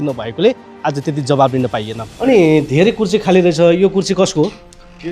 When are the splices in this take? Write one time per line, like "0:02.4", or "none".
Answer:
0:02.0